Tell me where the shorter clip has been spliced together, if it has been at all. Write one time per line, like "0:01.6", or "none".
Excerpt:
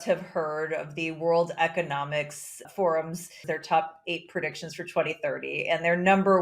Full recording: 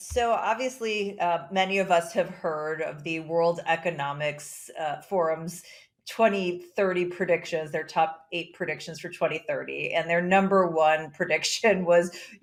0:02.7
0:03.4